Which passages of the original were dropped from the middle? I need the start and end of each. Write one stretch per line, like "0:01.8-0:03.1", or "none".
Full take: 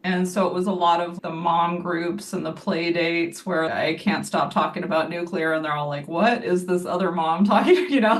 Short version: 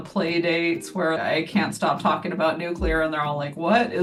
none